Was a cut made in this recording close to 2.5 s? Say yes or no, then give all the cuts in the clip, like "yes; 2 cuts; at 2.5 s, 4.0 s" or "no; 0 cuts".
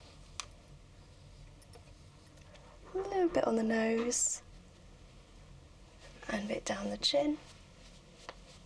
yes; 1 cut; at 2.5 s